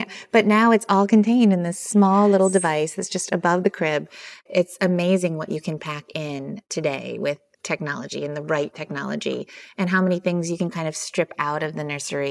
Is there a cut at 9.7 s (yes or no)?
no